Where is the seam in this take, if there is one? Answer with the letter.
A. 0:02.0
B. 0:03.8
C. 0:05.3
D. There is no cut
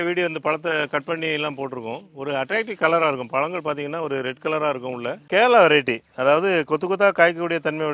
C